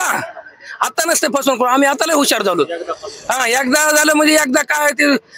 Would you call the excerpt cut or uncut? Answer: uncut